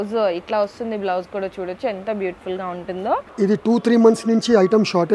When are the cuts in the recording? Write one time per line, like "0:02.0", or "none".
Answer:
0:03.3